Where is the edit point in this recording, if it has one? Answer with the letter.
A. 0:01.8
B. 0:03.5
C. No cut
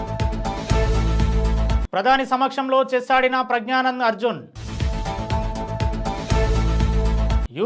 A